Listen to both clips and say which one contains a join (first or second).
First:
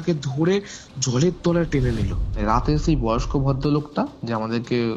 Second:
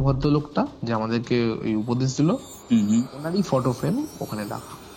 first